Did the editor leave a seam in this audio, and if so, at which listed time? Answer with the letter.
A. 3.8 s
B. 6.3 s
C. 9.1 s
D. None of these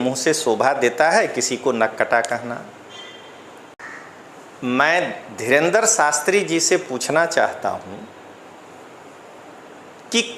A